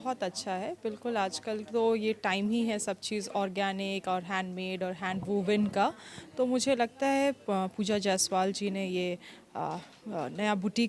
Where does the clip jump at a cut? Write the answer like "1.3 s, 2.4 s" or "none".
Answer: none